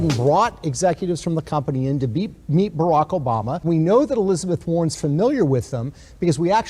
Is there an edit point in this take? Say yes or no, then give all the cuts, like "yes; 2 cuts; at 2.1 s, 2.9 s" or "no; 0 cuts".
yes; 1 cut; at 3.6 s